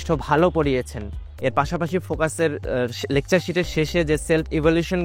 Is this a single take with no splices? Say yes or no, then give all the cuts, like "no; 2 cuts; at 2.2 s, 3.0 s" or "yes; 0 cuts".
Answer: no; 1 cut; at 1.2 s